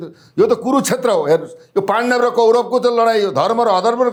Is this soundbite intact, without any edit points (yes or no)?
yes